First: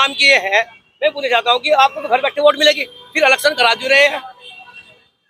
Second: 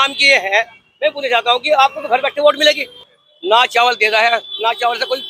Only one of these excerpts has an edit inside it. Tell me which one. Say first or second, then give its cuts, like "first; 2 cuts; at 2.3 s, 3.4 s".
second; 1 cut; at 3.0 s